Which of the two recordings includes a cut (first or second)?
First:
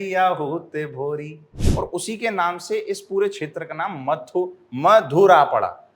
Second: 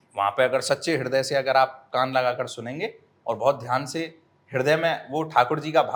first